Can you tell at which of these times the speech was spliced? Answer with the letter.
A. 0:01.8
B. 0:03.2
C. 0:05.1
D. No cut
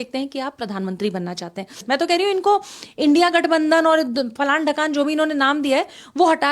A